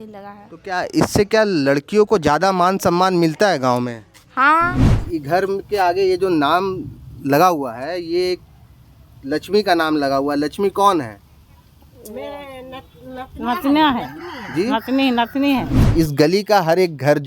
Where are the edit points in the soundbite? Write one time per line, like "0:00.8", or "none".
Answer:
0:04.9
0:15.8